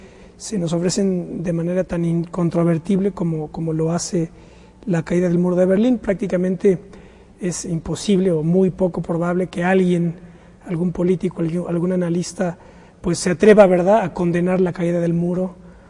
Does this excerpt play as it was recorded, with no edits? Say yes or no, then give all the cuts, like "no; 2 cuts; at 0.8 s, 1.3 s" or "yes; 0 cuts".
yes; 0 cuts